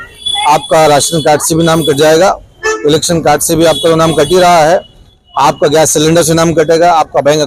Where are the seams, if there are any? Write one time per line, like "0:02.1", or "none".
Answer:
none